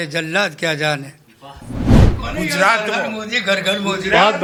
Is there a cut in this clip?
no; 0 cuts

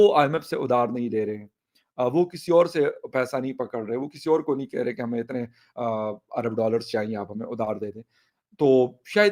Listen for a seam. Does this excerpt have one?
no; 0 cuts

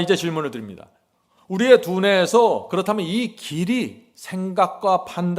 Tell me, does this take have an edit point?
no; 0 cuts

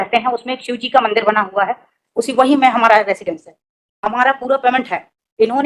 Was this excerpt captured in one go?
yes; 0 cuts

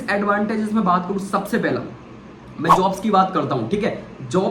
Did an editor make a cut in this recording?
no; 0 cuts

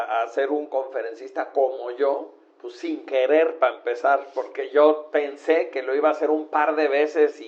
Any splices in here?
no; 0 cuts

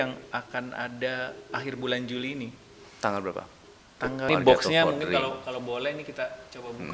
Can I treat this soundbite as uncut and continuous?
no; 1 cut; at 4.3 s

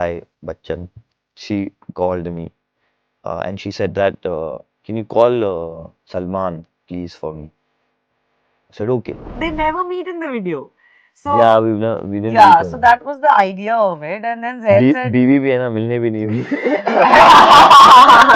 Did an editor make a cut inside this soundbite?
yes; 1 cut; at 9.4 s

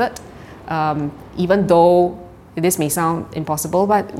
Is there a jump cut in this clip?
no; 0 cuts

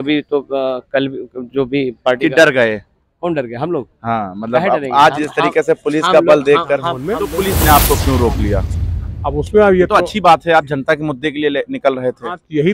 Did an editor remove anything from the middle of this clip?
yes; 1 cut; at 7.1 s

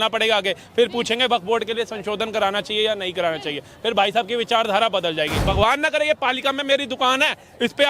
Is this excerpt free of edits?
no; 1 cut; at 5.4 s

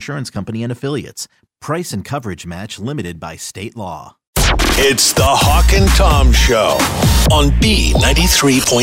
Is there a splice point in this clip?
yes; 1 cut; at 4.2 s

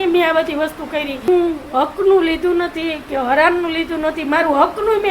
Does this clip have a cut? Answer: yes; 1 cut; at 1.3 s

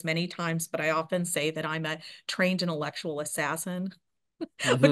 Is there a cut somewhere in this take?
no; 0 cuts

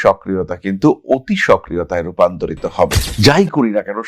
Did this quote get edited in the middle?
yes; 1 cut; at 3.0 s

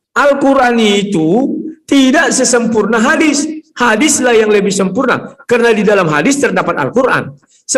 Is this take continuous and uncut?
yes; 0 cuts

